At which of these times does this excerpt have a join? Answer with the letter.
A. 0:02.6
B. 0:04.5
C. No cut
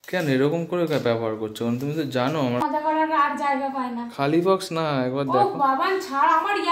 A